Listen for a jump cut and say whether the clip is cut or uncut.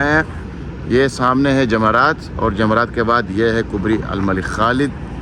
uncut